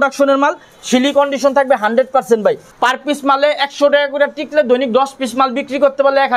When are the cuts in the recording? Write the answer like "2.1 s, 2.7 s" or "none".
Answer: 2.7 s